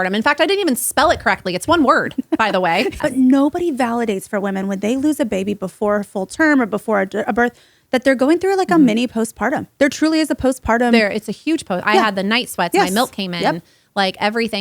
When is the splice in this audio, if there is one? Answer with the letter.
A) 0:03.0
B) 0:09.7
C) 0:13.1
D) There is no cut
A